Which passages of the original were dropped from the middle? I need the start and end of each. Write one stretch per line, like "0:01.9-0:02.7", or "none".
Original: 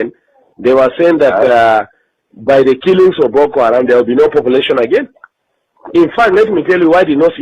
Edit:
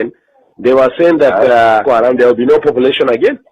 0:01.8-0:03.5